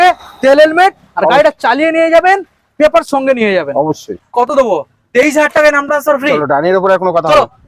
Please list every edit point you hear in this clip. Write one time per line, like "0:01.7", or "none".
0:04.2